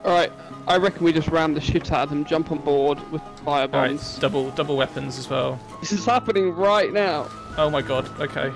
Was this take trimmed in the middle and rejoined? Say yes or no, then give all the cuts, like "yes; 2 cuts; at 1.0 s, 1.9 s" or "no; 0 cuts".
yes; 1 cut; at 5.9 s